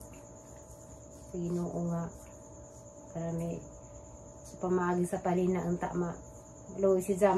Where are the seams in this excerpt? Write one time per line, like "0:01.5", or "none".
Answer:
none